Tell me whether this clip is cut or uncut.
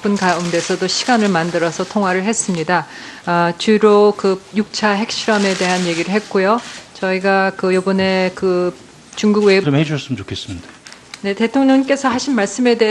uncut